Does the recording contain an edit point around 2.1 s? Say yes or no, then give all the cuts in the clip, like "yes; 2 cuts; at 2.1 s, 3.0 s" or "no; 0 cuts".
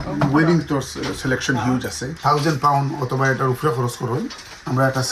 yes; 1 cut; at 2.1 s